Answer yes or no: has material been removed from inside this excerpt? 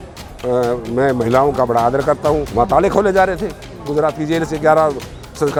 no